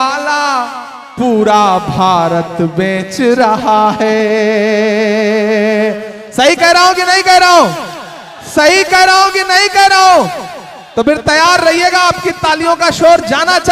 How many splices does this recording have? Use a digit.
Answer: 0